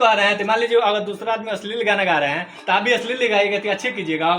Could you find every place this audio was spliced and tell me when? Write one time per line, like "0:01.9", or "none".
none